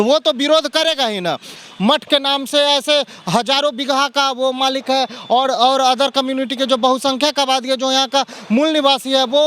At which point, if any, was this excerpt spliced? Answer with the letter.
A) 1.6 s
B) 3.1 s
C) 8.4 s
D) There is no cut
A